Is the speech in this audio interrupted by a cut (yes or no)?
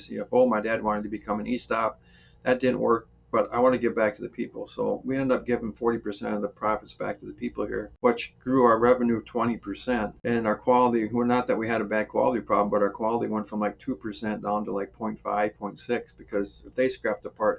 yes